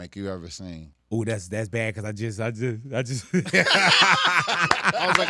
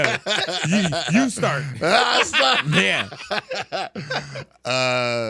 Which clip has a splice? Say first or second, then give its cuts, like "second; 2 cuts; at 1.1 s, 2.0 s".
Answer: first; 1 cut; at 0.9 s